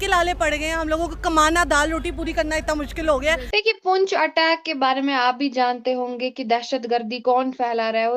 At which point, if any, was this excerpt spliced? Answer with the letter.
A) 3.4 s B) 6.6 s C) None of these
A